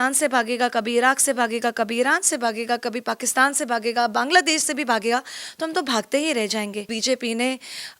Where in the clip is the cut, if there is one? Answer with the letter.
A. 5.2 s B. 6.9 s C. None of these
B